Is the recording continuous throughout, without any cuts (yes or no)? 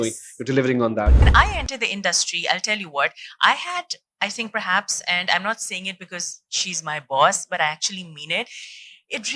no